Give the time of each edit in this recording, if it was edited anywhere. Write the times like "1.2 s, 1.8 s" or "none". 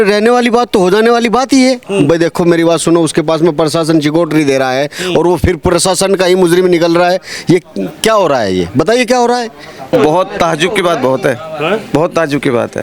9.9 s